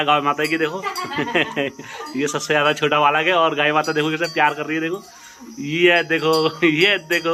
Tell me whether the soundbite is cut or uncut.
uncut